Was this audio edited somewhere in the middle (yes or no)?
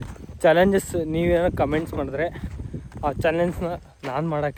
no